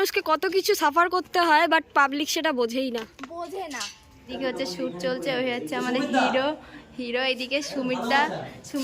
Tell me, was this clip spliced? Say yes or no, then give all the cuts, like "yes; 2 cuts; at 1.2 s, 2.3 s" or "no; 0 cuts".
yes; 1 cut; at 4.3 s